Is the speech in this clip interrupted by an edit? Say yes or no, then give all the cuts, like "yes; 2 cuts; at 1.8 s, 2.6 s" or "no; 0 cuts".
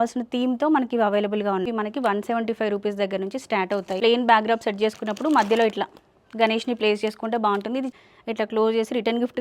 yes; 3 cuts; at 1.7 s, 4.0 s, 7.9 s